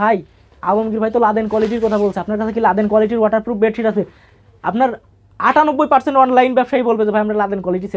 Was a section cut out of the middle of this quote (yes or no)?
no